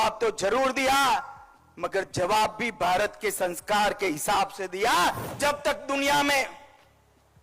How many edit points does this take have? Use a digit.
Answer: 1